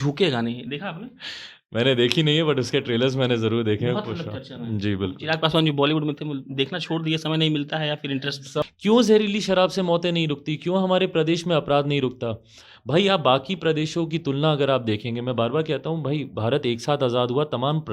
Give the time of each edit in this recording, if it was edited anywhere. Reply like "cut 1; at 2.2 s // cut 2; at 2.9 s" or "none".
cut 1; at 8.6 s